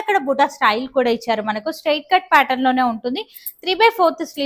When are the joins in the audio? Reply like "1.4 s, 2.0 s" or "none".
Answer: none